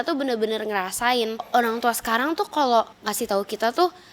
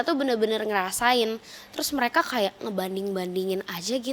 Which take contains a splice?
first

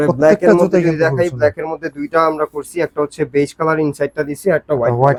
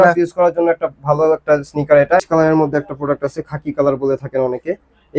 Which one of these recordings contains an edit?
second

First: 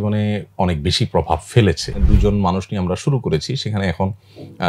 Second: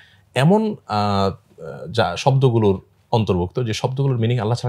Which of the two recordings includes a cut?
first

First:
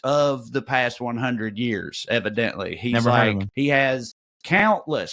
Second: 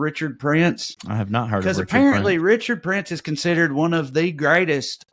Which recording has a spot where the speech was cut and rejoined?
first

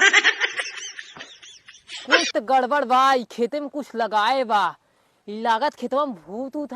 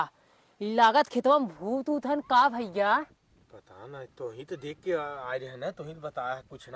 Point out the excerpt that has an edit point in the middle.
first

